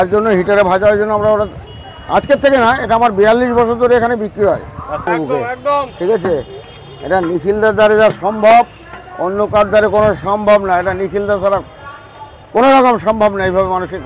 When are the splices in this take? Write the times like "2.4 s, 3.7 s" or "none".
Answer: 5.1 s

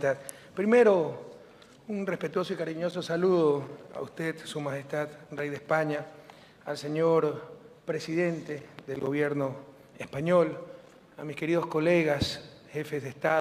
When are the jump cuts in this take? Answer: none

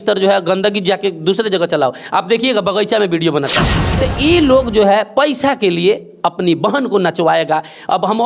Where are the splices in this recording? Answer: 3.8 s

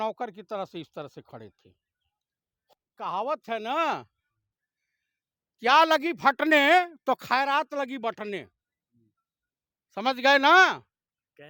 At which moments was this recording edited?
2.7 s

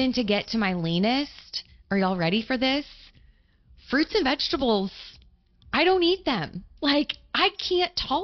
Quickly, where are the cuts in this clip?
none

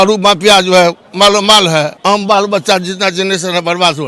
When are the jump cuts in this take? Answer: 1.9 s

